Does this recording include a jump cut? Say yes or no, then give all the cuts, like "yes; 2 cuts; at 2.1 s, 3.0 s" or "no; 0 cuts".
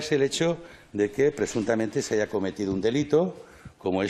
no; 0 cuts